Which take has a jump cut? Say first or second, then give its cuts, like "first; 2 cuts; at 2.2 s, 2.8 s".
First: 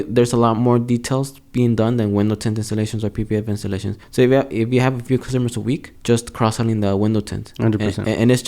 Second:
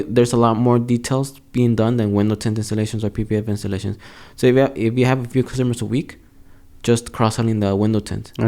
first; 2 cuts; at 4.0 s, 5.9 s